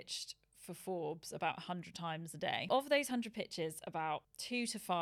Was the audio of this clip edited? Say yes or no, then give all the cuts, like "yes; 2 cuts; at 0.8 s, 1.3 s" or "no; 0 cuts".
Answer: yes; 1 cut; at 2.7 s